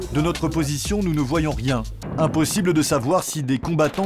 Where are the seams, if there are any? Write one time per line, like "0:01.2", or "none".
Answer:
0:02.0